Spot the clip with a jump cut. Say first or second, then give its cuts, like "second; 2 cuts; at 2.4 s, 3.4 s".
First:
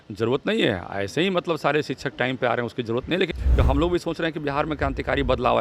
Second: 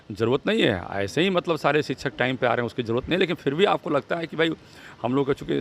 first; 1 cut; at 3.4 s